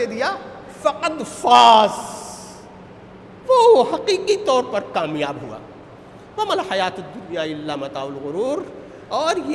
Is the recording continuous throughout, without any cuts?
yes; 0 cuts

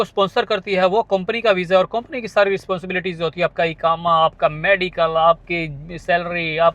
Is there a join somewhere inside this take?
no; 0 cuts

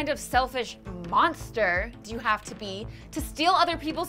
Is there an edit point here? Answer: no; 0 cuts

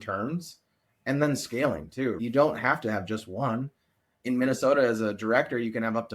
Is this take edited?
yes; 1 cut; at 2.2 s

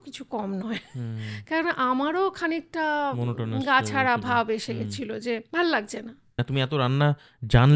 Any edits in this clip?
yes; 2 cuts; at 5.5 s, 6.4 s

